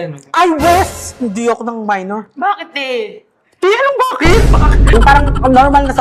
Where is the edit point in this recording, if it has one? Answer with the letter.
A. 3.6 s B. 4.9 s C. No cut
B